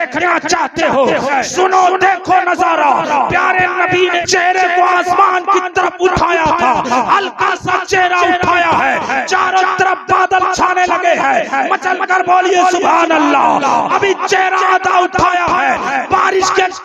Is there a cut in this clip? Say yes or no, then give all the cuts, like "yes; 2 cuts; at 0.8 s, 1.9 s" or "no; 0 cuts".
yes; 2 cuts; at 1.3 s, 4.2 s